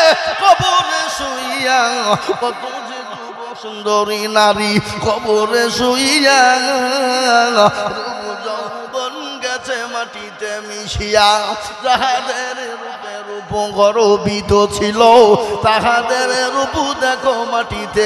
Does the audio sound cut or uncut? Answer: uncut